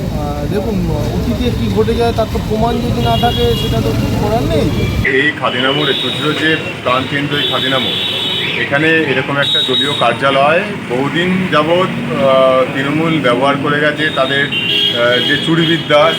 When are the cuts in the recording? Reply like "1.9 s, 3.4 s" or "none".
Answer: 5.1 s